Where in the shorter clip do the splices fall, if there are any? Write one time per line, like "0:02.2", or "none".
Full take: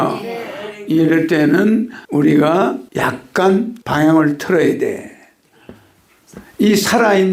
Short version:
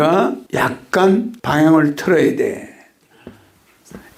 none

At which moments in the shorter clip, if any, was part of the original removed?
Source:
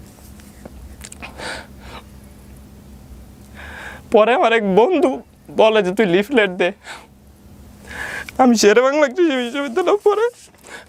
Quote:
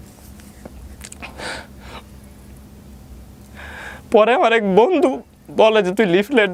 none

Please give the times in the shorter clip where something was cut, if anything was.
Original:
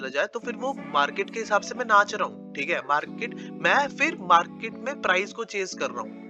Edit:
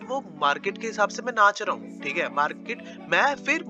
none

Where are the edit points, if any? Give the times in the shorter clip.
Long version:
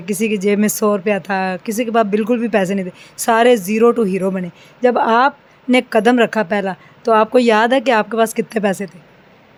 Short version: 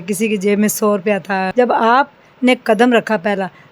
0:01.5

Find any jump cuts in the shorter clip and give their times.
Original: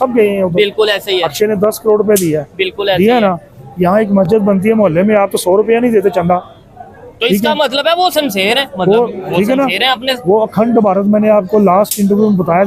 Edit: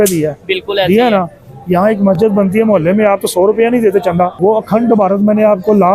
0:04.3

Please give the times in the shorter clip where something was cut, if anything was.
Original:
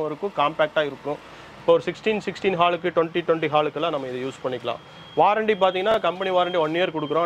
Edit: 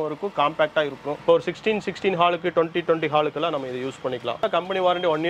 0:01.1
0:04.5

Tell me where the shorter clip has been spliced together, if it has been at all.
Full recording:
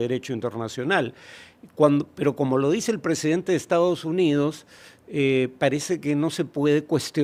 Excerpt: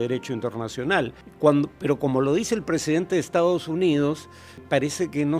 0:01.2
0:04.6

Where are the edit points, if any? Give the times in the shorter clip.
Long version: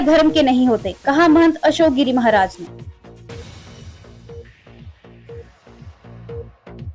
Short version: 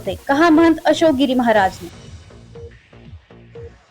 0:01.9

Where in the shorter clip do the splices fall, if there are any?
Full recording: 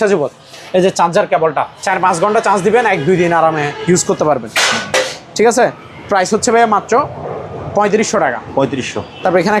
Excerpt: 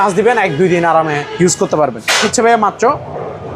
0:02.2

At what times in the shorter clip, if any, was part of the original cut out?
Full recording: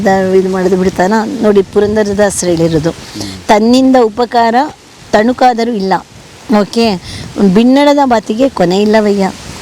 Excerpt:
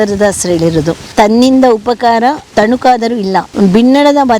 0:01.0
0:02.4
0:03.5

